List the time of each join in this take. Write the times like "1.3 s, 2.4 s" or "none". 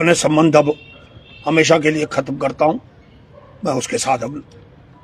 none